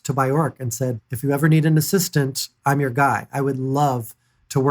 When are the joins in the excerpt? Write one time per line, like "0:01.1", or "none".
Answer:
0:01.0